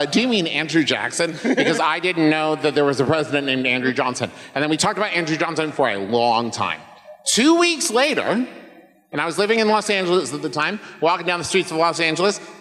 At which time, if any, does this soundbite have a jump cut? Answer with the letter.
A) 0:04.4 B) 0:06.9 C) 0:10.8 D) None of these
D